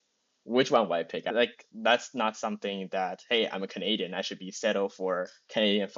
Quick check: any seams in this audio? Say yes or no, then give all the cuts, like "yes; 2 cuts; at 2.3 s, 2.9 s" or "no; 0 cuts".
yes; 1 cut; at 1.3 s